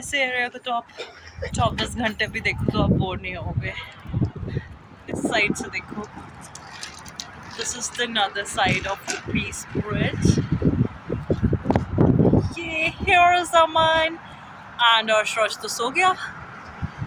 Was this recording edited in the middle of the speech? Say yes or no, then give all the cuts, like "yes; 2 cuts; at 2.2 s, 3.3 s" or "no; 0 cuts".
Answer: no; 0 cuts